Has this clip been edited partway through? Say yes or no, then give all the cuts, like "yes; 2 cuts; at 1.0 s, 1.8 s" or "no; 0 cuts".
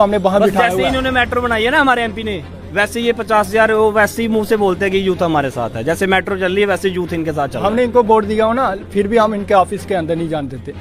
no; 0 cuts